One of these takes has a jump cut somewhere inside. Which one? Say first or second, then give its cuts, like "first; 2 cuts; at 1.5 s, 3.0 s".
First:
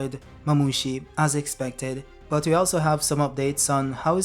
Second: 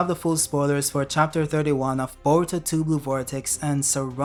first; 1 cut; at 2.1 s